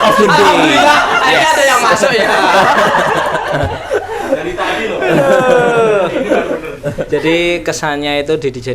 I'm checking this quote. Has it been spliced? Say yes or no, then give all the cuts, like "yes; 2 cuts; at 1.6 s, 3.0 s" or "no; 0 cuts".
no; 0 cuts